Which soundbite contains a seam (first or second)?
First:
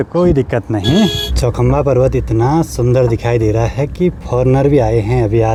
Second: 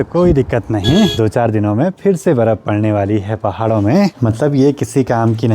second